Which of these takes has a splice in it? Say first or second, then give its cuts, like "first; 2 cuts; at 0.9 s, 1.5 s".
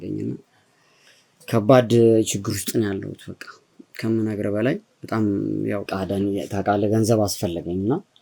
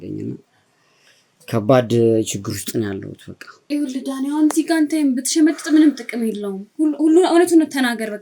second; 1 cut; at 3.7 s